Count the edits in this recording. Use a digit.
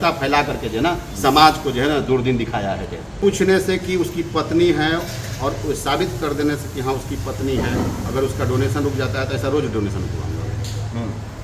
1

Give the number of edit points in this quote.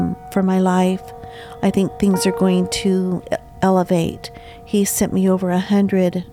0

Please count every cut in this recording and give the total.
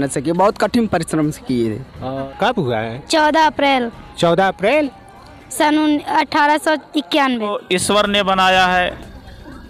2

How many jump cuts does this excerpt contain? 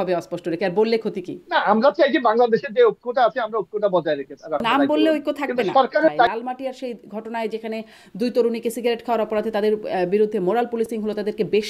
2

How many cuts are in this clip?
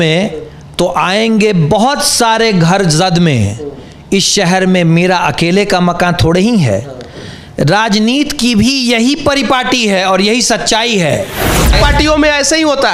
1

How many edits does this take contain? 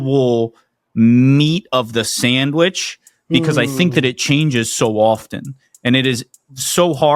0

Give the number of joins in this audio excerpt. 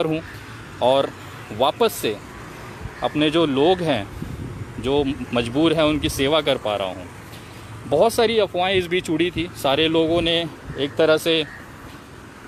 0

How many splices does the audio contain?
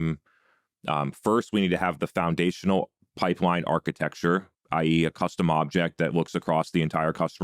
1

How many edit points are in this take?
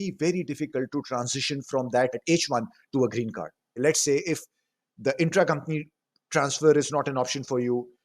2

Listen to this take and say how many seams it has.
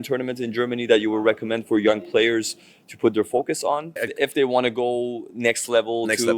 1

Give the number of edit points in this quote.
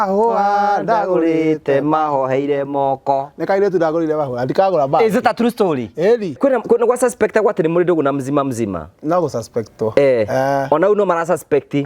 1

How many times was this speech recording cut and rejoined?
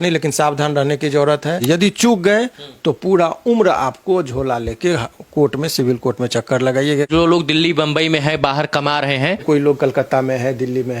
3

